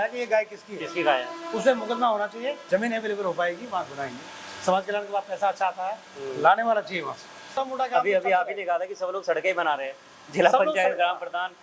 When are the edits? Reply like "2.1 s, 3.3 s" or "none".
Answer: 2.6 s, 7.6 s

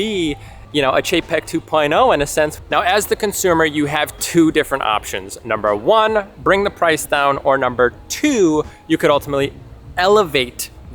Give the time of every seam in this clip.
none

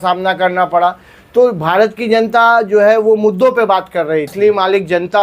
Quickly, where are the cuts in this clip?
4.3 s

